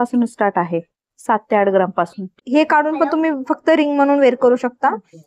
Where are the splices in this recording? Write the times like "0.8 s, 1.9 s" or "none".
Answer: 2.4 s